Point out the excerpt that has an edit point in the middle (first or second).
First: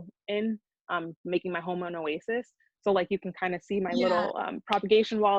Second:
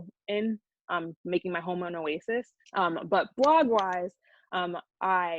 second